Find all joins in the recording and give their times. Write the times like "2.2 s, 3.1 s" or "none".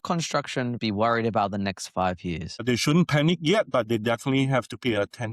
0.8 s, 2.6 s